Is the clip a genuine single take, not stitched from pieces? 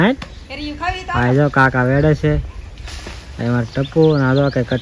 yes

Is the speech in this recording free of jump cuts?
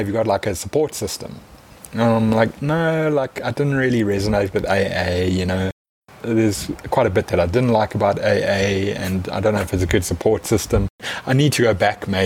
no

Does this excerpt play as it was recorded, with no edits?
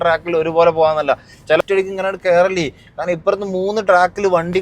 no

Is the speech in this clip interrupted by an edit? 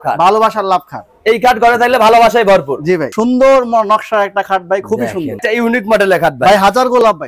yes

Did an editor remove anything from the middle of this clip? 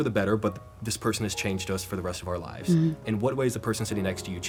no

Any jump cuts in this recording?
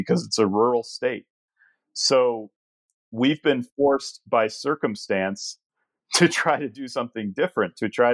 no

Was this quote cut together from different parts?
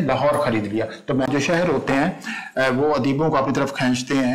yes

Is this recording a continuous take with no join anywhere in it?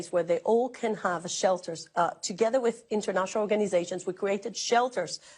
yes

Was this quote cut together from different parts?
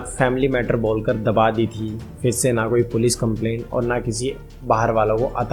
no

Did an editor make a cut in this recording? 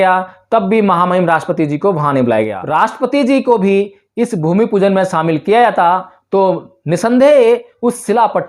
yes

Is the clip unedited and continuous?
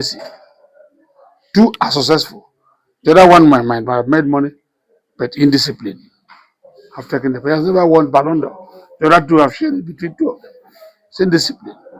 yes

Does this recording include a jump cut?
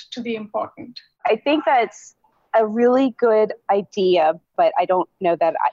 yes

